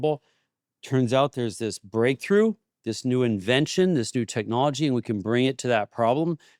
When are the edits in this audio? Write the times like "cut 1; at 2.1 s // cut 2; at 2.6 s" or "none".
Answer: none